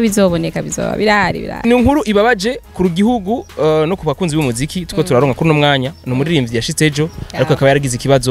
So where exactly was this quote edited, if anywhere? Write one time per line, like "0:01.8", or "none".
0:01.6